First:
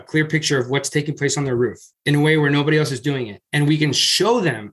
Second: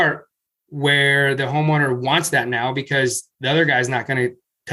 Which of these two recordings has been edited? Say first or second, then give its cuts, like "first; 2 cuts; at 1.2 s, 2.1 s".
first; 1 cut; at 3.4 s